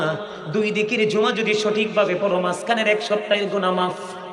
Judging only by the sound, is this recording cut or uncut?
uncut